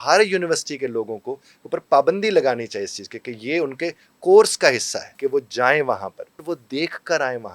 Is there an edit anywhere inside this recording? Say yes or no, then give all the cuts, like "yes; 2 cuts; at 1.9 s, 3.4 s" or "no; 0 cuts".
yes; 2 cuts; at 5.0 s, 6.4 s